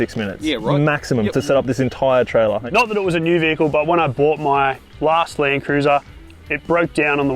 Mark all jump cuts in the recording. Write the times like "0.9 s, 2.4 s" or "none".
2.6 s, 4.9 s